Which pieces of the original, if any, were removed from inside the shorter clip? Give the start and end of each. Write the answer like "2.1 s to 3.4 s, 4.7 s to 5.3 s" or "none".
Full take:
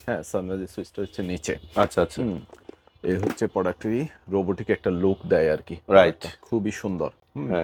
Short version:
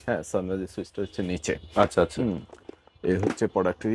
none

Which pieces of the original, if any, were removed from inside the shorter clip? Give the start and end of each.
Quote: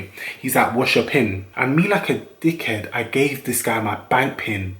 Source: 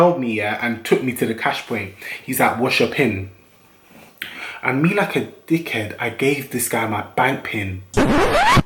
3.3 s to 4.5 s

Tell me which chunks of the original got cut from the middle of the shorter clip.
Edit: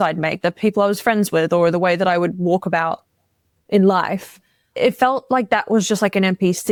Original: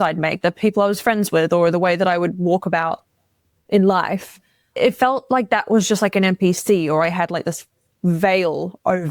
none

